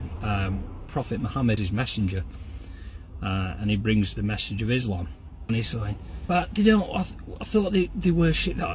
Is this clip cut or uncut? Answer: cut